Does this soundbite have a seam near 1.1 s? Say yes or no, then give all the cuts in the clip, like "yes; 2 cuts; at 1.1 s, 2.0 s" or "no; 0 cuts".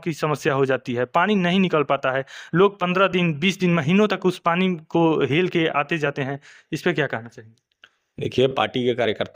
no; 0 cuts